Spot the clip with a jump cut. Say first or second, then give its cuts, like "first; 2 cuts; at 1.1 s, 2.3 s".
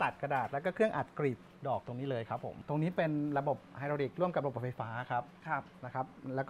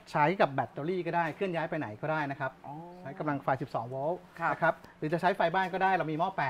first; 1 cut; at 2.5 s